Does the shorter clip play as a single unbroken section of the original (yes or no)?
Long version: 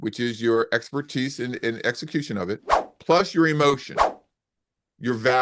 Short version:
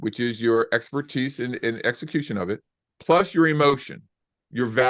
no